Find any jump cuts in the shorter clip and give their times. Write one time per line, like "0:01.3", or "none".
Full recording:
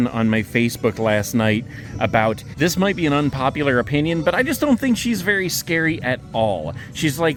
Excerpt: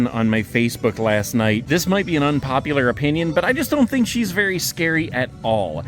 0:01.6